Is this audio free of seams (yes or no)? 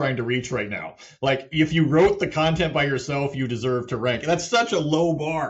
yes